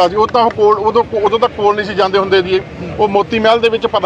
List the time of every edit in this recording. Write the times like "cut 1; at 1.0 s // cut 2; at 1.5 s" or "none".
none